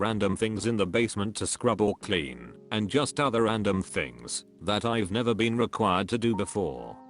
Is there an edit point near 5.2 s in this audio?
yes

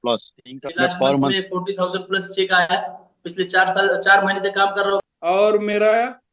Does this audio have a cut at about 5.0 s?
yes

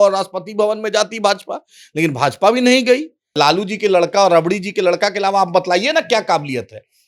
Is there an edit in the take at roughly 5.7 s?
no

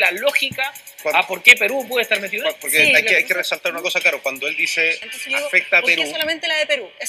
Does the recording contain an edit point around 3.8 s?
no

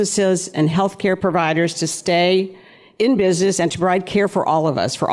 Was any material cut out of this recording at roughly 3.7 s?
yes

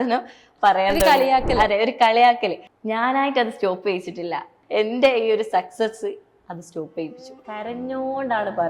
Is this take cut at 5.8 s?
no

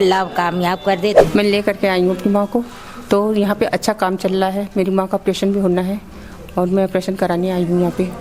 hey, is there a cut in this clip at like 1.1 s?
no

